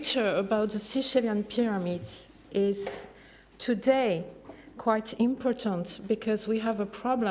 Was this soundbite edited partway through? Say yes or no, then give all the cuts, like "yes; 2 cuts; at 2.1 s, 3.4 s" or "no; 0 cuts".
no; 0 cuts